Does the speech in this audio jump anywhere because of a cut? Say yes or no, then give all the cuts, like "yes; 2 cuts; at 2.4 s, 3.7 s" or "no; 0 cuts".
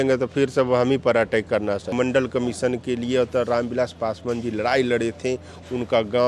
yes; 1 cut; at 1.9 s